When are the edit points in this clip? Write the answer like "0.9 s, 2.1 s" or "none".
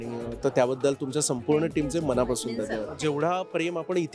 2.9 s

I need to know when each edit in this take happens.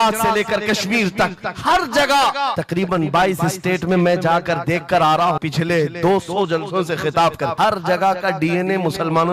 2.6 s, 5.4 s, 7.5 s

